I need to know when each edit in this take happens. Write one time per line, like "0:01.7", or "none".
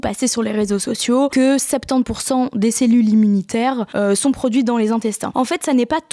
0:01.3
0:03.9
0:05.2